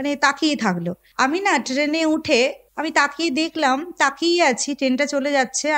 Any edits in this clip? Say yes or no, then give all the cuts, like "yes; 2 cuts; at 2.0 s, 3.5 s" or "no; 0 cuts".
yes; 2 cuts; at 1.0 s, 2.7 s